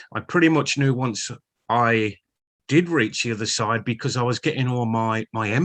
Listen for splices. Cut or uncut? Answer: uncut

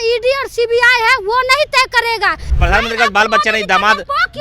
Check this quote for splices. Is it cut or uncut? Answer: cut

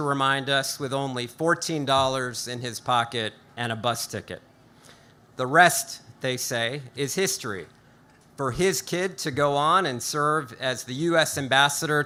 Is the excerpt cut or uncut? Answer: uncut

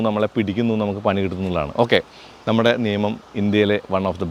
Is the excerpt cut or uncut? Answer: uncut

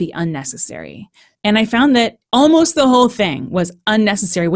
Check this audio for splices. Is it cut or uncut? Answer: cut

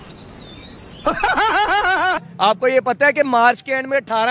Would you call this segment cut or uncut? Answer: cut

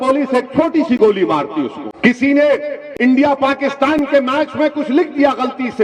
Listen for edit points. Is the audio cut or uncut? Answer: cut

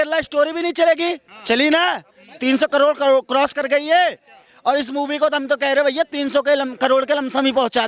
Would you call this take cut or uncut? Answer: uncut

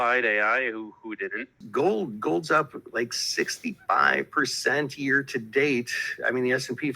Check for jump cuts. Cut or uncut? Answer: cut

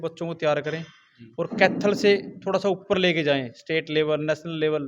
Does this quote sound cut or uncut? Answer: uncut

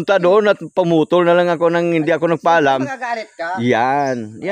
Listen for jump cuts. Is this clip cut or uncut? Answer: uncut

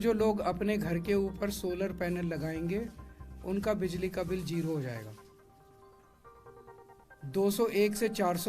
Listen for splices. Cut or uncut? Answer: cut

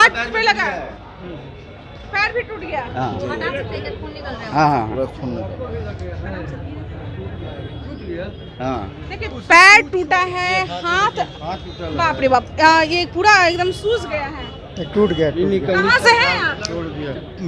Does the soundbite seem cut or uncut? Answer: uncut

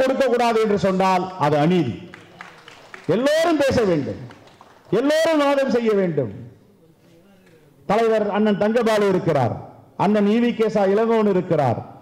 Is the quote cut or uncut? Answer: uncut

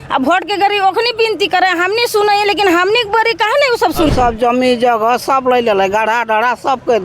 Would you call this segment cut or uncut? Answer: cut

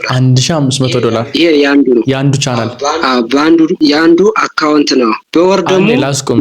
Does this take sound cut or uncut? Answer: cut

